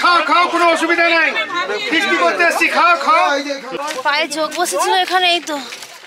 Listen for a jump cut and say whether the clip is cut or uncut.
cut